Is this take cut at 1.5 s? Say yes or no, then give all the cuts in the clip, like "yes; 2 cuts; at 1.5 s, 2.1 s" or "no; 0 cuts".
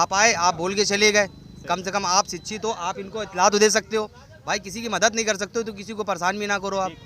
no; 0 cuts